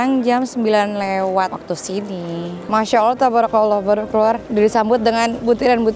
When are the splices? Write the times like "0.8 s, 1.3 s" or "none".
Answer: 2.7 s